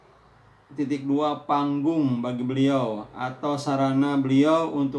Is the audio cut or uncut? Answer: uncut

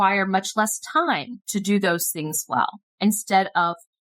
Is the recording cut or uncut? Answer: cut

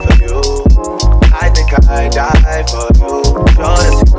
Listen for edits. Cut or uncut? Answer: uncut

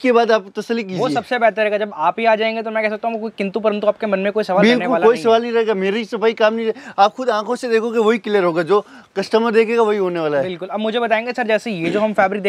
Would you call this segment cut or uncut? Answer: uncut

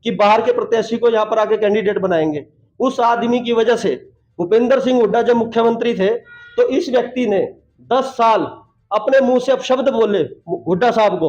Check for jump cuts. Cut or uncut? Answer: uncut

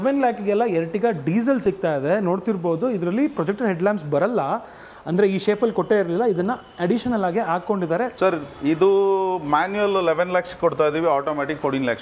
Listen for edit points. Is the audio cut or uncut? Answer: cut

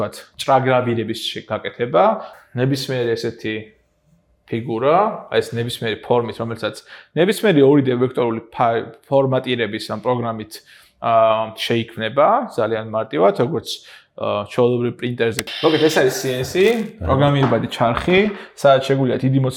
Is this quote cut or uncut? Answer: cut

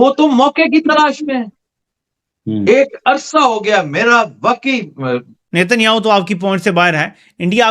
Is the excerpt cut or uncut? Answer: cut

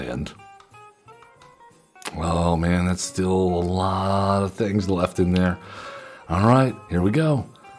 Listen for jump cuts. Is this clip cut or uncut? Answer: cut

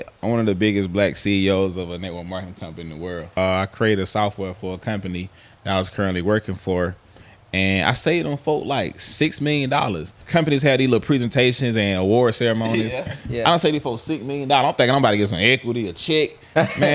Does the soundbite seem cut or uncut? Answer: cut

